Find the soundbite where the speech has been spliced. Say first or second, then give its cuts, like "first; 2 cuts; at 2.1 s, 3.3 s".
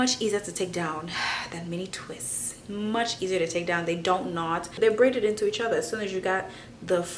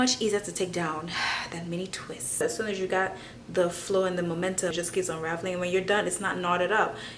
second; 2 cuts; at 2.4 s, 4.7 s